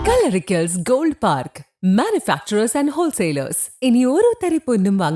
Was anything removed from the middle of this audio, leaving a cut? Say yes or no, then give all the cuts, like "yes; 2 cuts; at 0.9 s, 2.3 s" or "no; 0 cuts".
no; 0 cuts